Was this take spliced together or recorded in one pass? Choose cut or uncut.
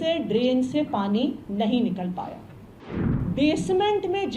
cut